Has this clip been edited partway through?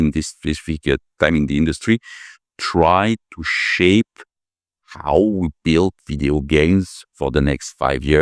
no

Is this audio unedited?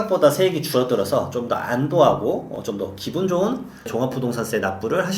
no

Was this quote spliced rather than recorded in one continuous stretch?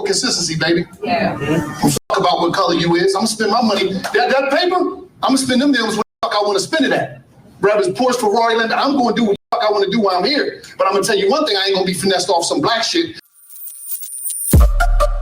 yes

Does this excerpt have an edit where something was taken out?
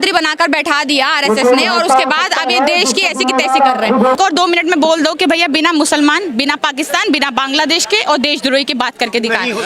yes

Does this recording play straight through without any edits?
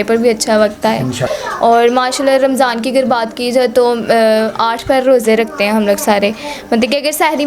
no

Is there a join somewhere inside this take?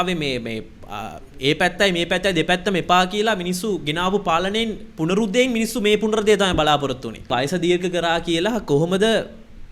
yes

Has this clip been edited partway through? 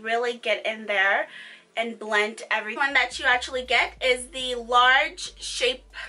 no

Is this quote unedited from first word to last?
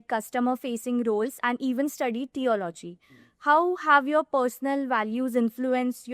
yes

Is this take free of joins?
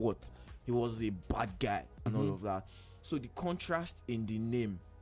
no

